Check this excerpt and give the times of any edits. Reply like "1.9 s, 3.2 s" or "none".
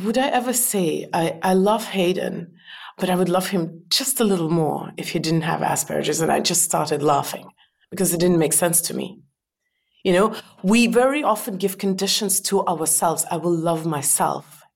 none